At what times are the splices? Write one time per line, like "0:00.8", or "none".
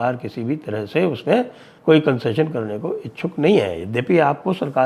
0:01.6